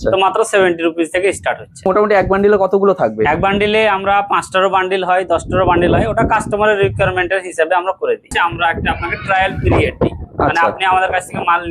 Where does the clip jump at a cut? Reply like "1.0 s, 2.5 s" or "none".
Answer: 1.9 s, 8.3 s